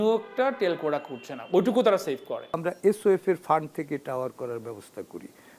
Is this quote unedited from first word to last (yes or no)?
no